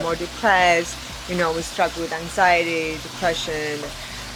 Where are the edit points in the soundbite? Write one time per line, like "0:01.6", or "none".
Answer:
none